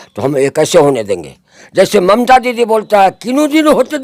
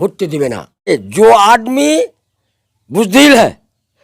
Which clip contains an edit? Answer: second; 1 cut; at 0.9 s

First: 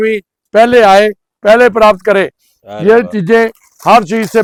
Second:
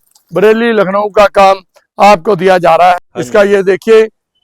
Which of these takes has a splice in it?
second; 1 cut; at 3.0 s

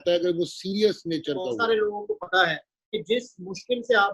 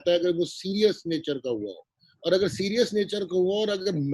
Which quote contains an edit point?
first; 1 cut; at 1.6 s

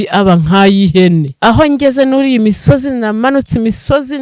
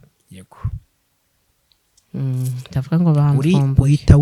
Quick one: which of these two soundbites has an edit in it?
first; 1 cut; at 1.3 s

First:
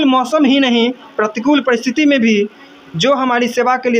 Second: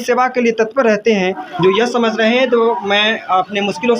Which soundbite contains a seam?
second; 1 cut; at 1.4 s

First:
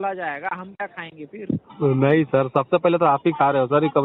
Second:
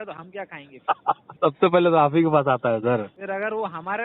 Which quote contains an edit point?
second; 2 cuts; at 1.3 s, 3.2 s

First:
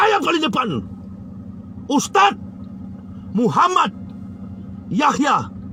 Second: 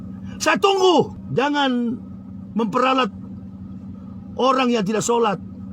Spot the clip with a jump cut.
second; 1 cut; at 1.2 s

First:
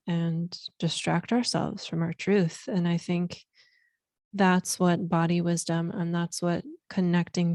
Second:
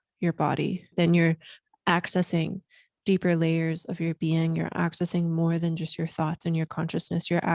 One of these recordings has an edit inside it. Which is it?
second; 1 cut; at 0.9 s

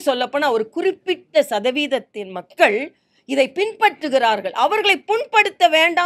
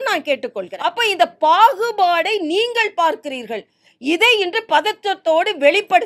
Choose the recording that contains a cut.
second; 1 cut; at 0.9 s

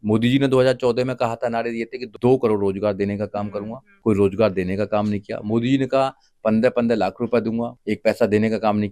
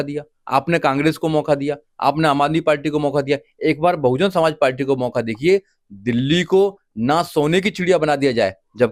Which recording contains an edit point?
first; 3 cuts; at 2.0 s, 3.9 s, 7.7 s

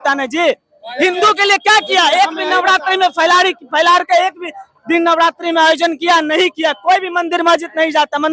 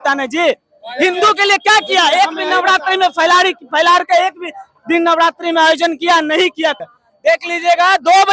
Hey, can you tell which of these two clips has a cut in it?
second; 1 cut; at 6.8 s

